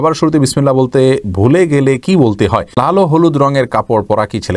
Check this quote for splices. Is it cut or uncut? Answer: cut